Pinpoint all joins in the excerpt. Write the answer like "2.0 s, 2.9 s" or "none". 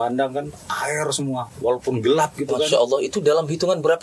none